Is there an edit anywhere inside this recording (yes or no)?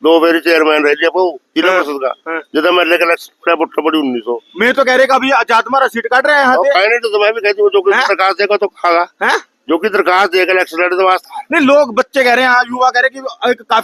no